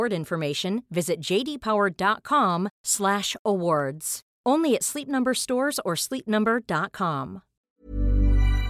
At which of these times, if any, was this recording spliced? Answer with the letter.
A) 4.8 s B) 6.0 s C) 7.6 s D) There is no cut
C